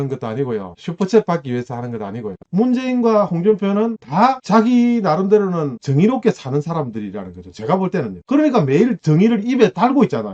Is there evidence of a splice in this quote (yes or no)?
yes